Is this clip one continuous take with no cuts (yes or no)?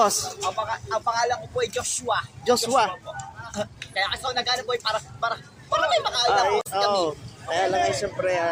yes